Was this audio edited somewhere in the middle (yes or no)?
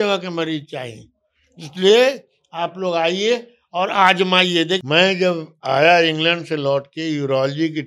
yes